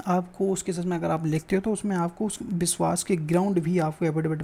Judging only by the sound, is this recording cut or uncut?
uncut